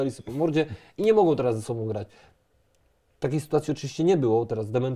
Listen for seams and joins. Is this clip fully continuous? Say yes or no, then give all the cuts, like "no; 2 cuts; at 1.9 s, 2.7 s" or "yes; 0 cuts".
yes; 0 cuts